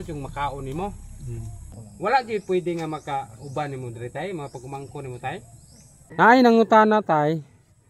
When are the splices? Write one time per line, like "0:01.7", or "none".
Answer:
0:01.7
0:06.1